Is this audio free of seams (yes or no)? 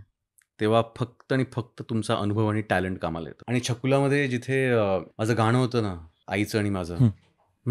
no